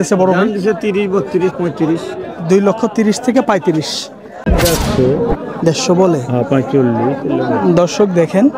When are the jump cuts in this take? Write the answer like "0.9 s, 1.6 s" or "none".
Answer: 4.4 s